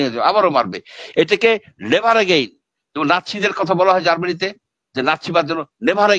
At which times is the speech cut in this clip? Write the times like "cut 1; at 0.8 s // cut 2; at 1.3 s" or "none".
none